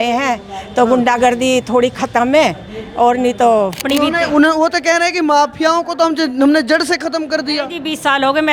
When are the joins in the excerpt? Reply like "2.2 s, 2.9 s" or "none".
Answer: 3.8 s